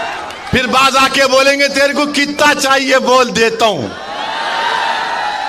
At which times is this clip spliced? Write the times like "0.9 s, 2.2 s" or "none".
none